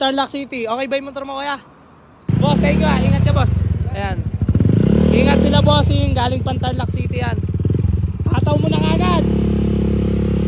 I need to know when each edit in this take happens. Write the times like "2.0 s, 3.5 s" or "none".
2.3 s